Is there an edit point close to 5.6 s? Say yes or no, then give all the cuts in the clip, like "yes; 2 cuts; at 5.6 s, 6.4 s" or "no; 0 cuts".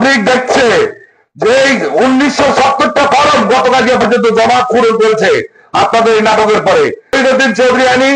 no; 1 cut; at 7.1 s